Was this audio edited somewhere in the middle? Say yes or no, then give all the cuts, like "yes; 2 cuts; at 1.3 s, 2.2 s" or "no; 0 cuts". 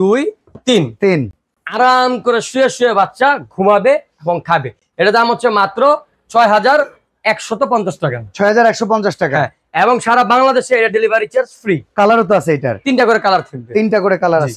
no; 0 cuts